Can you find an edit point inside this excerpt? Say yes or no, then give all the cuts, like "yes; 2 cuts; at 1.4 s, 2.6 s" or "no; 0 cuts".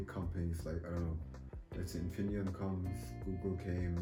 no; 0 cuts